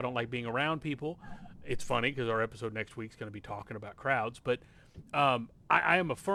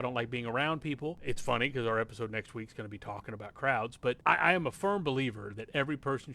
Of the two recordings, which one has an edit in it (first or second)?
second